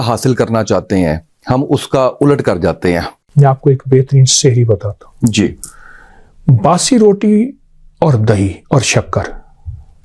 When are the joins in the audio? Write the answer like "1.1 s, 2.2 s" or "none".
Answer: 3.2 s